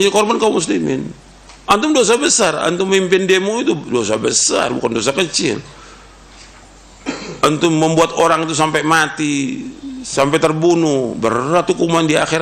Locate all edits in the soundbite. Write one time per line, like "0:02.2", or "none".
none